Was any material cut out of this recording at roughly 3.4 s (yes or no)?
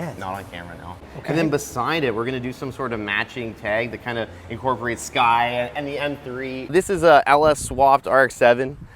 no